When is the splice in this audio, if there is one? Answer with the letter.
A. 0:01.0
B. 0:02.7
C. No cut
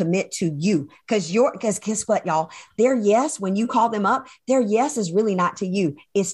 C